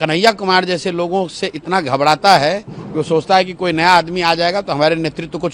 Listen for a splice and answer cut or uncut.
uncut